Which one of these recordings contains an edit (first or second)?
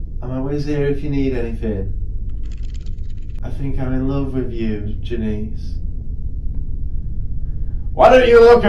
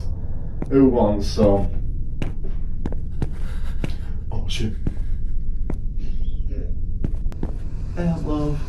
first